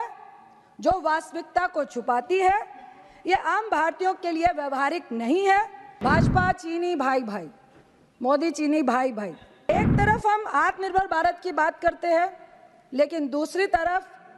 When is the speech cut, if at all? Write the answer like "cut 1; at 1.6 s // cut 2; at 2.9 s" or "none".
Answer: cut 1; at 5.8 s // cut 2; at 9.7 s